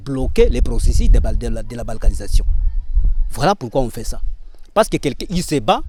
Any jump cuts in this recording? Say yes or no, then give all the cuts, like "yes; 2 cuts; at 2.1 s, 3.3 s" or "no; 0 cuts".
no; 0 cuts